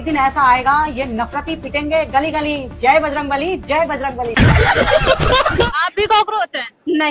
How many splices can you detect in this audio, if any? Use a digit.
1